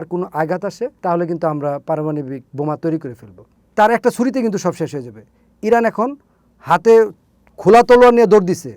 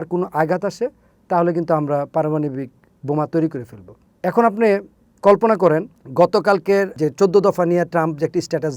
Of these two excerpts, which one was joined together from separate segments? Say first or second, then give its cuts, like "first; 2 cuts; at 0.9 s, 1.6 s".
first; 3 cuts; at 1.0 s, 2.4 s, 3.6 s